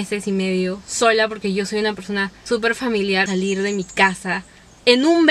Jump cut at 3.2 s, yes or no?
yes